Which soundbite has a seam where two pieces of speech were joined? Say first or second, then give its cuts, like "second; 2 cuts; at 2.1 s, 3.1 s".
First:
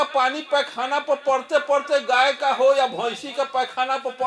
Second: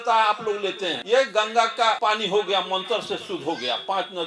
second; 2 cuts; at 0.9 s, 2.0 s